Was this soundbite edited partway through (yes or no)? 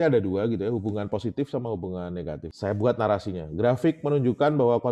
yes